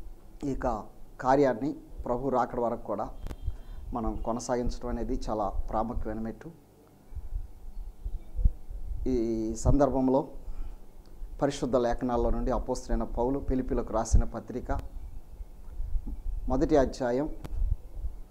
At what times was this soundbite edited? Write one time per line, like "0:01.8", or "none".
0:05.5